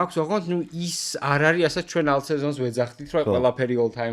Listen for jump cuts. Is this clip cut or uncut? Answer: uncut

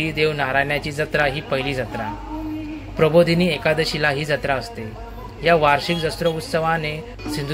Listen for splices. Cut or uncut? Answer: uncut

